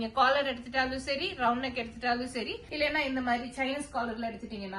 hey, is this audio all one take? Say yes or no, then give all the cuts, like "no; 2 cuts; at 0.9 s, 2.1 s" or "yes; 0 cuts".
yes; 0 cuts